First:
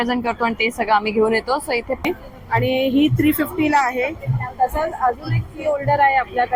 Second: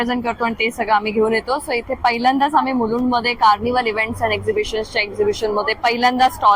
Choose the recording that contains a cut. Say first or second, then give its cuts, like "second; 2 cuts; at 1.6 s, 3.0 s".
first; 1 cut; at 2.0 s